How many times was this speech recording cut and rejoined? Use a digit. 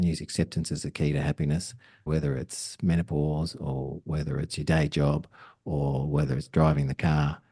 1